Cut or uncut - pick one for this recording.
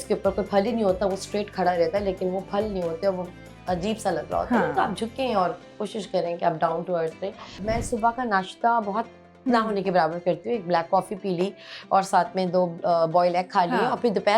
cut